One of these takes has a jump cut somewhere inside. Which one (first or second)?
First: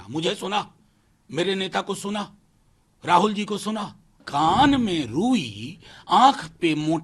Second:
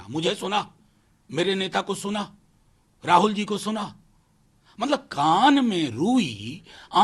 first